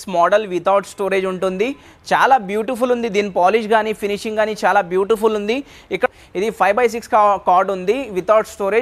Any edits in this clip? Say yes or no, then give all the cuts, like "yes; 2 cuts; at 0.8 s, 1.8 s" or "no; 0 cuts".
yes; 1 cut; at 6.1 s